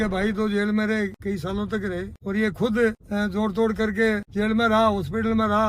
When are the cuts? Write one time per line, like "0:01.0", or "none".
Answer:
0:01.2
0:02.1
0:03.0
0:04.3